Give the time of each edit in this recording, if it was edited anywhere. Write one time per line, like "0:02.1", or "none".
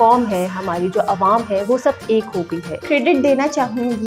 0:02.8